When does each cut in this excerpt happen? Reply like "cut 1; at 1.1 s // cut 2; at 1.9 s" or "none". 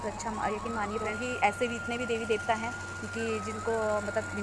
cut 1; at 1.1 s